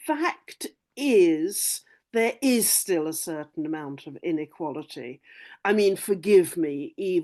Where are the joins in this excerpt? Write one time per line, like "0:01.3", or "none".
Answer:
none